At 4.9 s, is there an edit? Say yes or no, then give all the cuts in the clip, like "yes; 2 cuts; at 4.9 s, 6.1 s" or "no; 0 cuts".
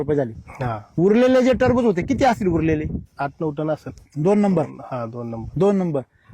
no; 2 cuts; at 1.0 s, 3.1 s